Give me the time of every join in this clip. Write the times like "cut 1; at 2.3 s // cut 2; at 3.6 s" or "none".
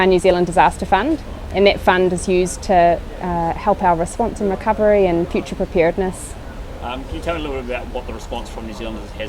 none